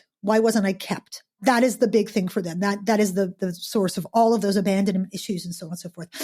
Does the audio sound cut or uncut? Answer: cut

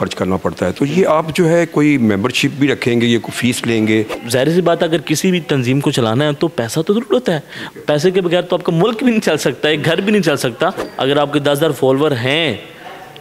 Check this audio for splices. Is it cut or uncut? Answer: cut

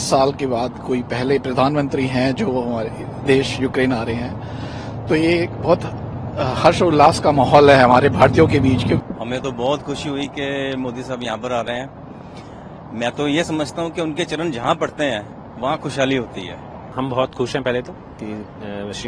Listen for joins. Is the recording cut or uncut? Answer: cut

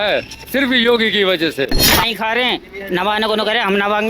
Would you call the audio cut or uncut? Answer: cut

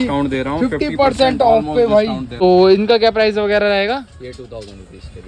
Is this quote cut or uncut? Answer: cut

